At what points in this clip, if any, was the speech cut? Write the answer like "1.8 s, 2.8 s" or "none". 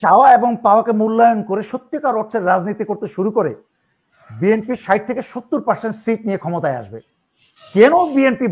none